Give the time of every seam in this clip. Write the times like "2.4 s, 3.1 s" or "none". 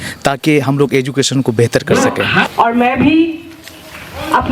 2.4 s